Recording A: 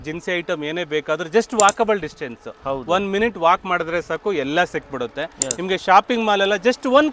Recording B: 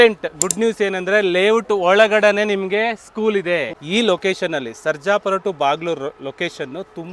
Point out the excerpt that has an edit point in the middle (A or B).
B